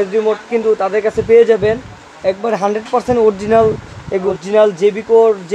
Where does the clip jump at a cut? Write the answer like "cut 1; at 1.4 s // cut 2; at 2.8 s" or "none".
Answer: cut 1; at 4.2 s